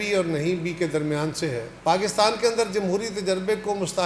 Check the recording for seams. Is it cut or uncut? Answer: cut